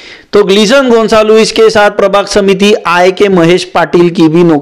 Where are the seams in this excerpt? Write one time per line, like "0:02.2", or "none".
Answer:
none